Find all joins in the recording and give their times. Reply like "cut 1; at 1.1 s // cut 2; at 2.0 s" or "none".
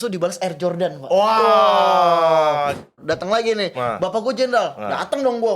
cut 1; at 2.9 s